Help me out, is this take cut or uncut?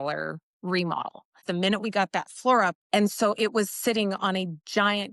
cut